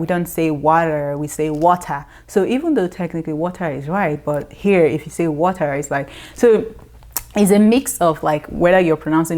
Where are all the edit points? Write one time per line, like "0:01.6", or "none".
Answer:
none